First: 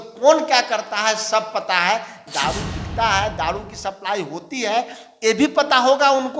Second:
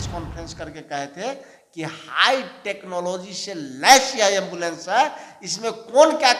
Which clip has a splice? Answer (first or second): first